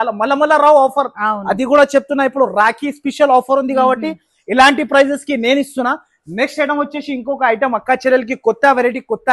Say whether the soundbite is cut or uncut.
uncut